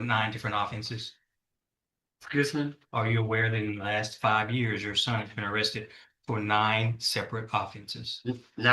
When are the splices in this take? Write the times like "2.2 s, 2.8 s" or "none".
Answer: none

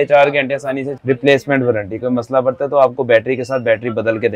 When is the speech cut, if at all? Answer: 0.9 s

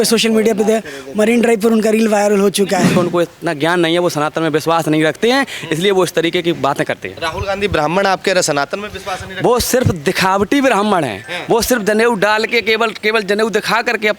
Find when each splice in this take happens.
2.9 s

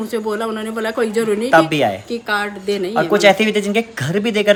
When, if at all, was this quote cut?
none

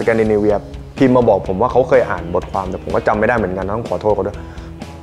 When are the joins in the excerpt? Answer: none

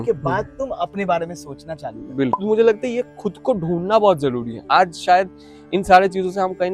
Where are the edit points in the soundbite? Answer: 2.4 s

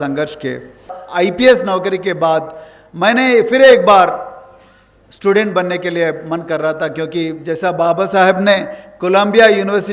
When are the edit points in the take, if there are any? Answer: 1.0 s

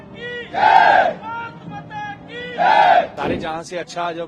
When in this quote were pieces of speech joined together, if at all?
3.1 s

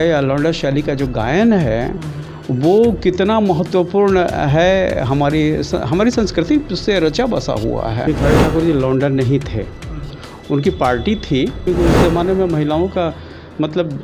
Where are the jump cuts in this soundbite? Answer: 8.0 s, 11.6 s

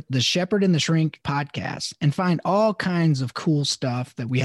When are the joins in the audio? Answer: none

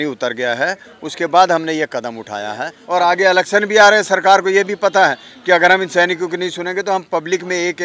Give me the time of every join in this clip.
2.7 s

